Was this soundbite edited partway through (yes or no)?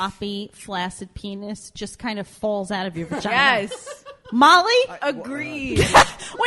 yes